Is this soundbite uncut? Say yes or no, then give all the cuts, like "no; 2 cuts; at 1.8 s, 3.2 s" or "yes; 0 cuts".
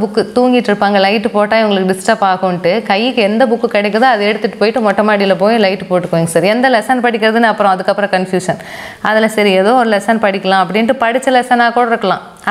yes; 0 cuts